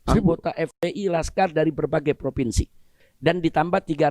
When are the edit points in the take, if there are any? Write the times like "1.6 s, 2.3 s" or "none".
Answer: 2.8 s